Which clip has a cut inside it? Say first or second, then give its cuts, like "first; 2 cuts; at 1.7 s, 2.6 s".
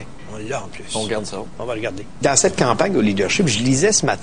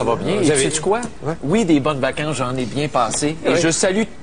first; 1 cut; at 1.4 s